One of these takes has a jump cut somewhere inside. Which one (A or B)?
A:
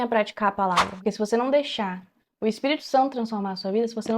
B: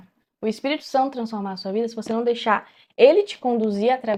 A